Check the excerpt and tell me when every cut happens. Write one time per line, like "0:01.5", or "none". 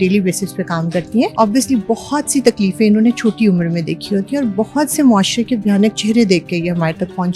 0:01.3